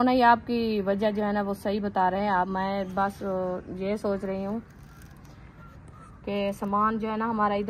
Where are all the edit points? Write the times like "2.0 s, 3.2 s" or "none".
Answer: 2.5 s